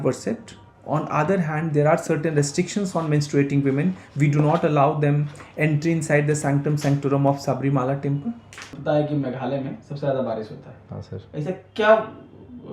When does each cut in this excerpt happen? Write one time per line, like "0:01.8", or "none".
0:08.8